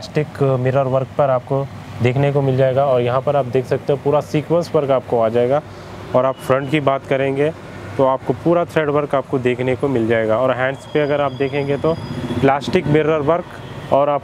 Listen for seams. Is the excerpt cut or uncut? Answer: uncut